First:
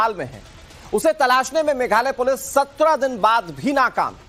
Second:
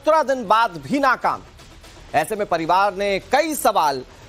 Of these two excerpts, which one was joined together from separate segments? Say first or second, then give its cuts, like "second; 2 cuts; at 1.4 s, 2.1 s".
second; 1 cut; at 2.8 s